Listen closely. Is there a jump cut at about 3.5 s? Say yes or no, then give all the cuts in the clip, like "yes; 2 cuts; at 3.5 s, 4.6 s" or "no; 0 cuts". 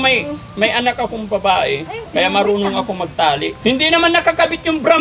yes; 1 cut; at 3.5 s